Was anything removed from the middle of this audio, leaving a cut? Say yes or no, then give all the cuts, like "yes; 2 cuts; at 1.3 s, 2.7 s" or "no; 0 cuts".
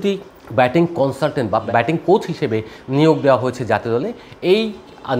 no; 0 cuts